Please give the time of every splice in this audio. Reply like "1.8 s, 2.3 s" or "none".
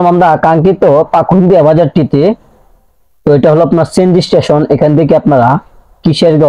none